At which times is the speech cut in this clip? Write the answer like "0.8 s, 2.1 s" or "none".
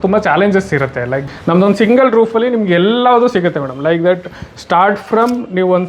1.2 s